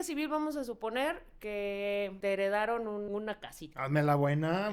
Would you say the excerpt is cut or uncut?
cut